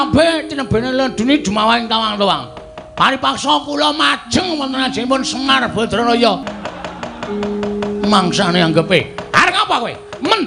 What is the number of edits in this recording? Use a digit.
1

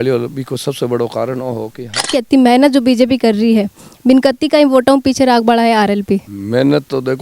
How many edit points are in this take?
2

